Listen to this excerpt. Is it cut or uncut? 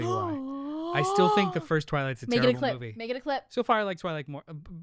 uncut